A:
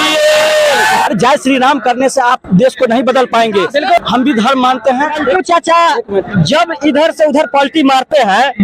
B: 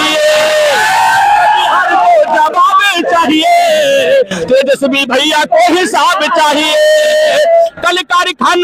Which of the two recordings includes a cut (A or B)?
A